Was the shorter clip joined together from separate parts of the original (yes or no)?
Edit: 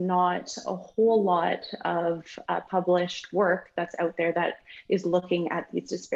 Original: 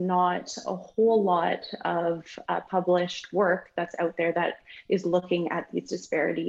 no